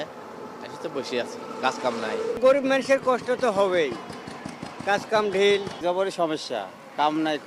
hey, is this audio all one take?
yes; 0 cuts

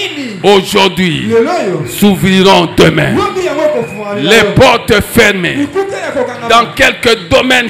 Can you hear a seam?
no; 0 cuts

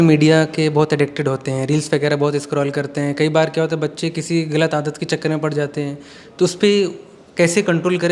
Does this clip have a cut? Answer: no; 0 cuts

